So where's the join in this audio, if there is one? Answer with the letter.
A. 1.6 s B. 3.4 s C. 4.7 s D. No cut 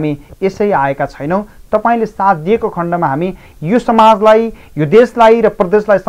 D